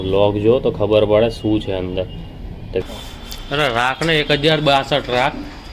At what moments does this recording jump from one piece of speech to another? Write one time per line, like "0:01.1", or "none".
0:02.8